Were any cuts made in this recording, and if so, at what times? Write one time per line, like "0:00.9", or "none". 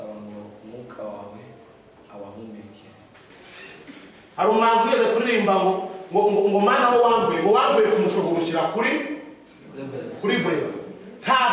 0:03.3